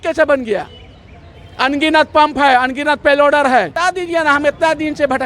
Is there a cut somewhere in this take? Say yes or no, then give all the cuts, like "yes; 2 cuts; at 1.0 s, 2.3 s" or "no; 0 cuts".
yes; 1 cut; at 3.8 s